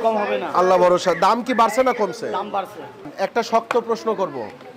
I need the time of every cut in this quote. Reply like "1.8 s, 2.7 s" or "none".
3.1 s